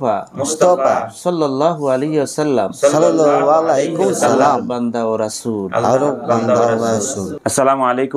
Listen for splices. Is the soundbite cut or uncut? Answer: cut